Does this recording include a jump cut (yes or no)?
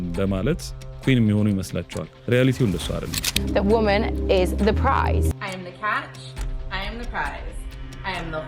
yes